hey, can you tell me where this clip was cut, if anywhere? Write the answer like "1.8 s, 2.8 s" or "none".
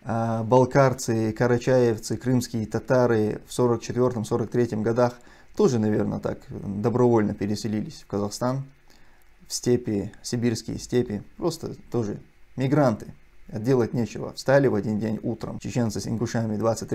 15.5 s